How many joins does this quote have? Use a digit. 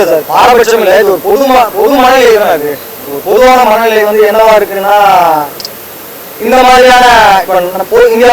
0